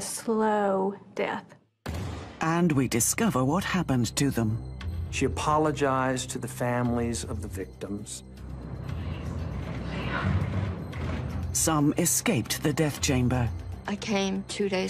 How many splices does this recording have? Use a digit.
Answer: 1